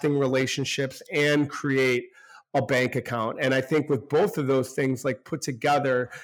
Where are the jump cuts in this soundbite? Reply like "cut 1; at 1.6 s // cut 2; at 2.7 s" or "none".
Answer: none